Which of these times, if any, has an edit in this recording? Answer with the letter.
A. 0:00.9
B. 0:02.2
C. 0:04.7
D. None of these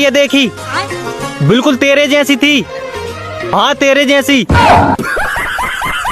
D